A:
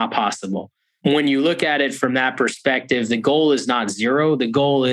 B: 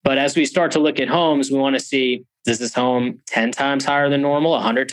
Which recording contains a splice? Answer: B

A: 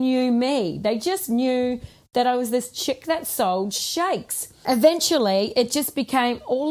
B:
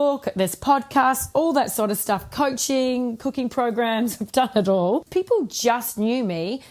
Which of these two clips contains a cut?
B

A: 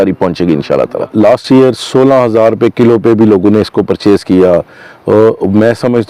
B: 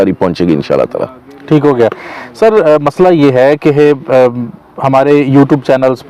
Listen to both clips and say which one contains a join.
A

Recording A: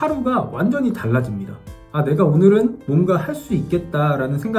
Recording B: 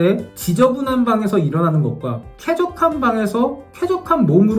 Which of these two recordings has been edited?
A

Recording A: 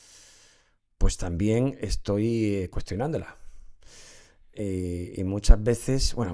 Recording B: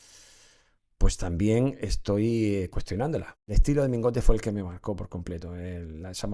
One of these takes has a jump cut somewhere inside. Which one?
B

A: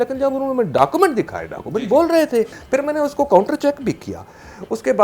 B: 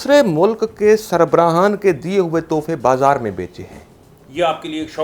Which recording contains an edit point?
A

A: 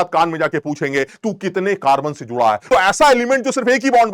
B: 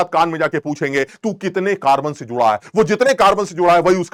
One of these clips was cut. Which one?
A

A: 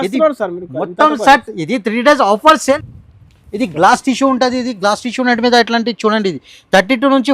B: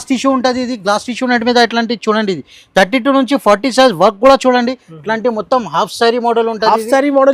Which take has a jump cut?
A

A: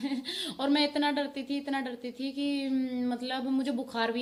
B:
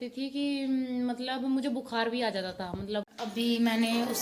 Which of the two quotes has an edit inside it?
B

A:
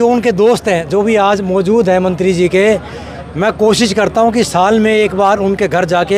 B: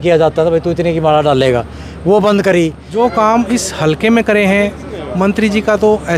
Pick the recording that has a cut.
B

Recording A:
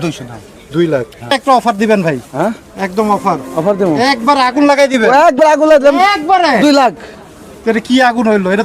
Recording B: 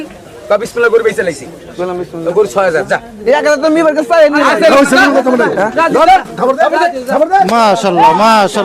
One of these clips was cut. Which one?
A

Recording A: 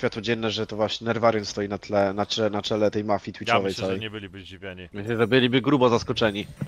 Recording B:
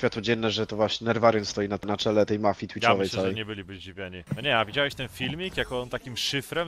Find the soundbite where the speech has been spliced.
B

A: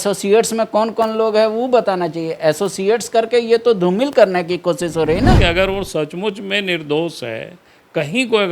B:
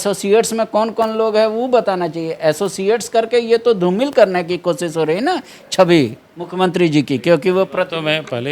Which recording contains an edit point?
A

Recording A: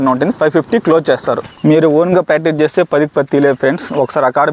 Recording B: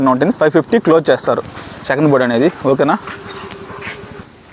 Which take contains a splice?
A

